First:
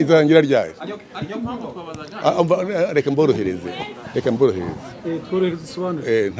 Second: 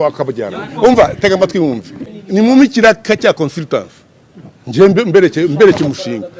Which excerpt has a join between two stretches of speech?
second; 1 cut; at 2.1 s

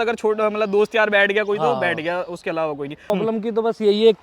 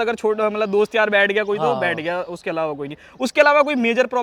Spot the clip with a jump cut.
first; 1 cut; at 3.1 s

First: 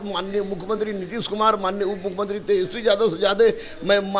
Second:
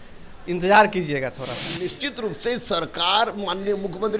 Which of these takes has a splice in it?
second; 1 cut; at 1.7 s

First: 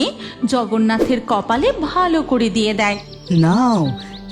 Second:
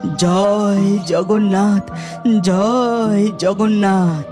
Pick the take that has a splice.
first; 1 cut; at 3.1 s

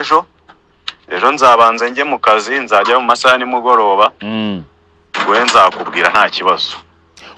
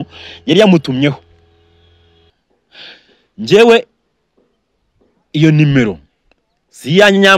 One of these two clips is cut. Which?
second; 1 cut; at 2.3 s

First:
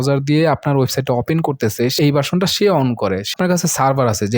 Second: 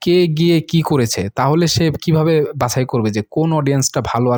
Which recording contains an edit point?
first; 2 cuts; at 1.9 s, 3.3 s

